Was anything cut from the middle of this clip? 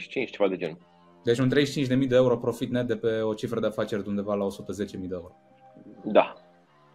no; 0 cuts

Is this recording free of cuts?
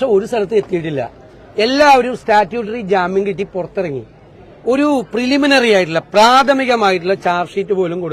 yes; 0 cuts

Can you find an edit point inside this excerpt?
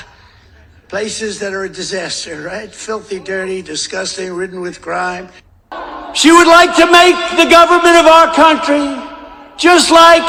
no; 0 cuts

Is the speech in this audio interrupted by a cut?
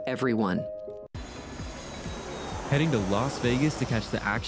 yes; 1 cut; at 1.1 s

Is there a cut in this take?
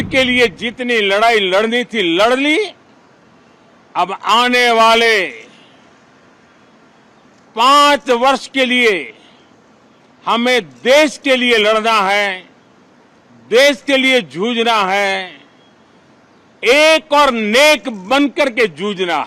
no; 0 cuts

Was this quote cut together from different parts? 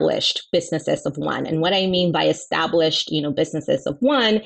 no; 0 cuts

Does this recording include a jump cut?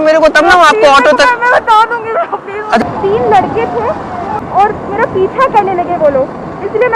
yes; 2 cuts; at 2.8 s, 4.3 s

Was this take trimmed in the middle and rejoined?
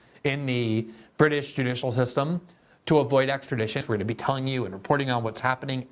yes; 1 cut; at 3.8 s

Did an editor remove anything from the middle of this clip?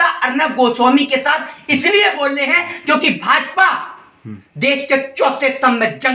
no; 0 cuts

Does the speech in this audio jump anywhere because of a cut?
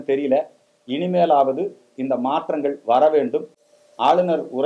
no; 0 cuts

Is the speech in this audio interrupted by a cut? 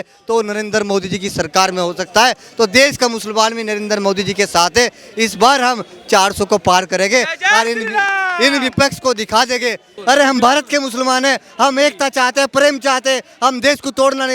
yes; 1 cut; at 9.9 s

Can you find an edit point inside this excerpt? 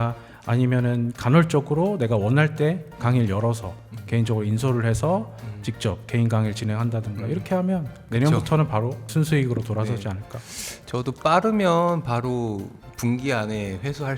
yes; 1 cut; at 8.0 s

